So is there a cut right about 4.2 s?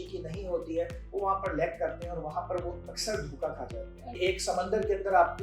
yes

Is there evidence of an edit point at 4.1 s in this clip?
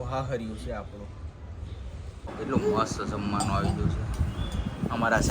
no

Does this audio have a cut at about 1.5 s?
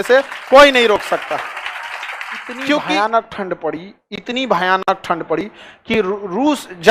no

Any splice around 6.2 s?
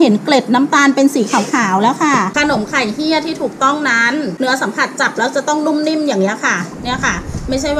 no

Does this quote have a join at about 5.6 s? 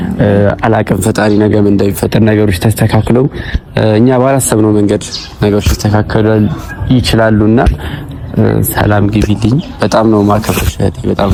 no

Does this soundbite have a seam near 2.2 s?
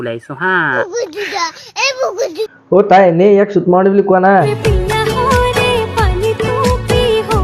no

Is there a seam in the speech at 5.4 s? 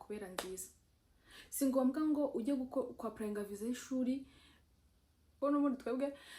yes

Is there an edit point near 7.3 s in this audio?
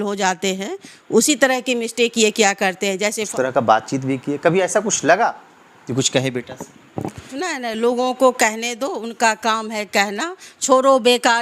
yes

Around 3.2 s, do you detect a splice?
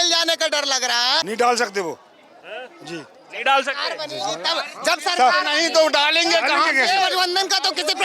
no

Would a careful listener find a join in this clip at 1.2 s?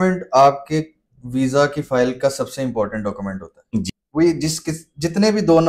no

